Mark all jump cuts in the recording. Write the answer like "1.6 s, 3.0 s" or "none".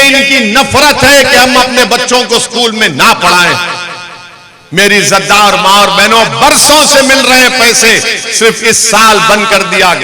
none